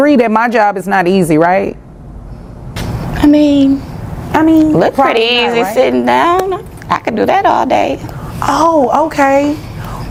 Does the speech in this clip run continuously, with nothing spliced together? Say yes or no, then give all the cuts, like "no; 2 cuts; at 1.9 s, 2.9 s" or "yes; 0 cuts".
yes; 0 cuts